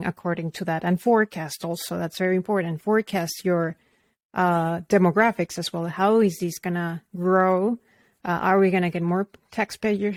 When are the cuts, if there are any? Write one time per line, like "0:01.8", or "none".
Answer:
none